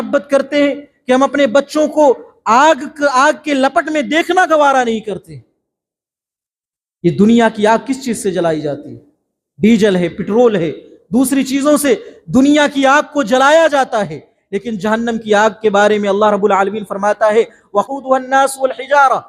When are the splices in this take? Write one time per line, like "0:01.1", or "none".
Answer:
0:17.9